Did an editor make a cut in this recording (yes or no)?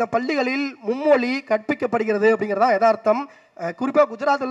no